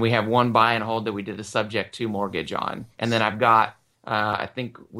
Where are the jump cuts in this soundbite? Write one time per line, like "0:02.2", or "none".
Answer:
0:03.9